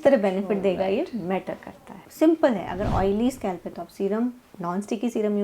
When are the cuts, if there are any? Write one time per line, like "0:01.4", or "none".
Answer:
0:02.0